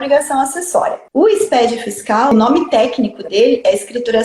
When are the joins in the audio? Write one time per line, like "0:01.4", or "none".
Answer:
0:01.0
0:02.3